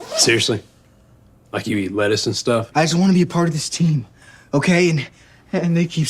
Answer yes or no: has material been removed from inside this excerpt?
yes